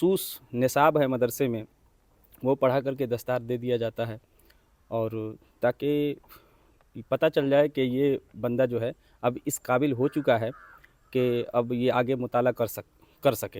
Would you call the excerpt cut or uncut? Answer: uncut